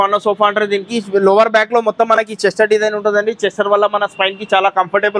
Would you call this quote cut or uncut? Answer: uncut